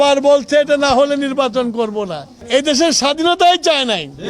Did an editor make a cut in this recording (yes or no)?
yes